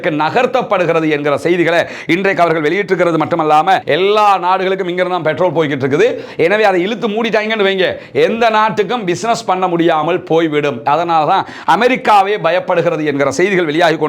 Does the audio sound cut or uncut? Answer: cut